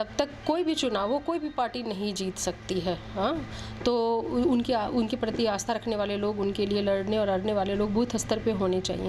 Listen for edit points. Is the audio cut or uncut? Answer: uncut